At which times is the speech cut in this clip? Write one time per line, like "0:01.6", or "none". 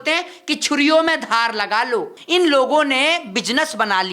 0:02.2